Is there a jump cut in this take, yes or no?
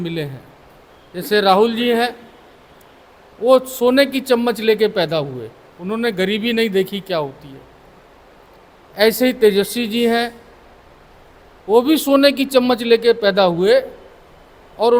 no